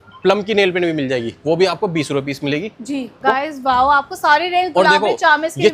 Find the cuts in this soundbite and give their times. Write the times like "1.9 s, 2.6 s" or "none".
3.2 s